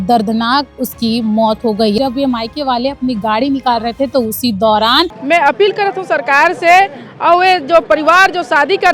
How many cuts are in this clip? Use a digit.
2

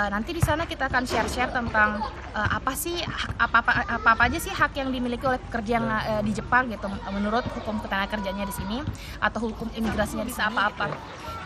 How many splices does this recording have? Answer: 1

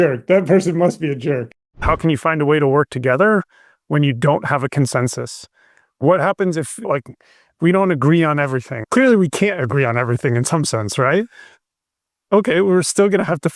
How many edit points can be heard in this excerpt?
3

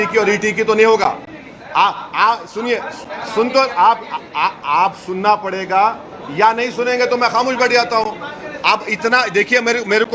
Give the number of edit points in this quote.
0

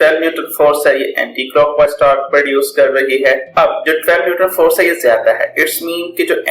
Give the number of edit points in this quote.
1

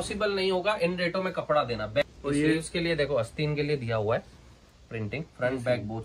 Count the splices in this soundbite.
1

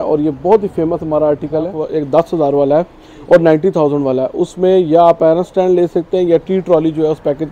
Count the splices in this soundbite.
1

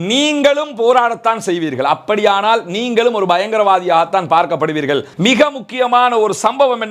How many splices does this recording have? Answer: 1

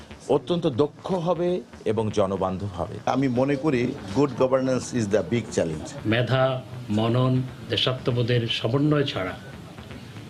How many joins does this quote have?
2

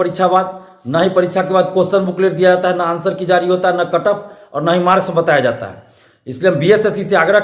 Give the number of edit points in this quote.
0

